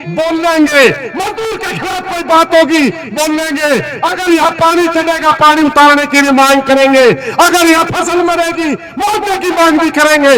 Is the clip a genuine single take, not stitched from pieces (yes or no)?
yes